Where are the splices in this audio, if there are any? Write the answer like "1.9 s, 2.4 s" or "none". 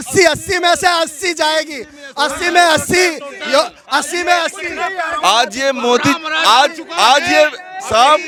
none